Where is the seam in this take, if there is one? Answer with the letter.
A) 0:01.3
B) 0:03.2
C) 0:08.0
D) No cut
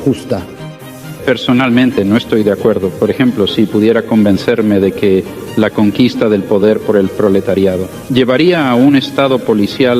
C